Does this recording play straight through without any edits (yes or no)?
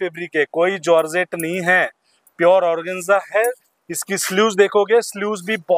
yes